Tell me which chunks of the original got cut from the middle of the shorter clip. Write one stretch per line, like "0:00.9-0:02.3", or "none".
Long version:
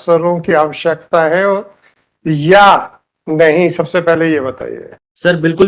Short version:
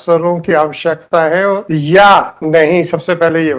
0:01.6-0:02.2
0:02.9-0:03.2